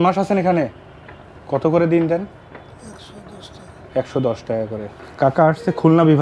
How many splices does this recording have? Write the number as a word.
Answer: zero